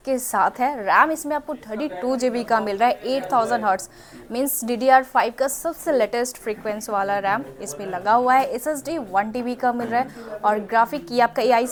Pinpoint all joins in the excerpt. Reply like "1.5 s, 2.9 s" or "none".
none